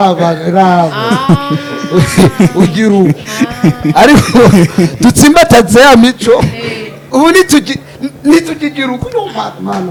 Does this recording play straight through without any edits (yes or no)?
yes